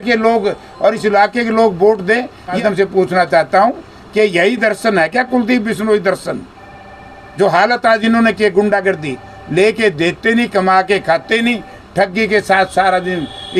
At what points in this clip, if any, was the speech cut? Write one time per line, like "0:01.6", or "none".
0:02.6